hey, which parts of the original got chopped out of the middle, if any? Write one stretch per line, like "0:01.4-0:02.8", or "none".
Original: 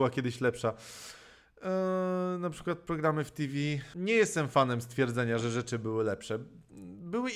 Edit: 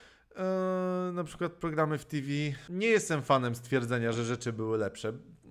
none